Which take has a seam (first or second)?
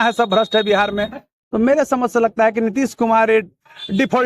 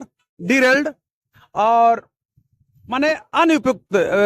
first